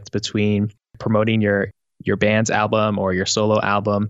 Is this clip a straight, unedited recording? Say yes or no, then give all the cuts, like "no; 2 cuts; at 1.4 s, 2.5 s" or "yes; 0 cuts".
no; 1 cut; at 1.0 s